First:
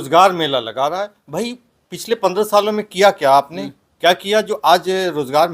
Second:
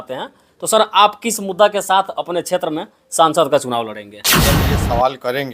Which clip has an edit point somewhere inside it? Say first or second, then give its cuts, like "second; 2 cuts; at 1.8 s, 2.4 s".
second; 1 cut; at 4.4 s